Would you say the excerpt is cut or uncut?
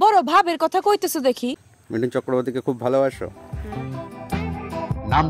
cut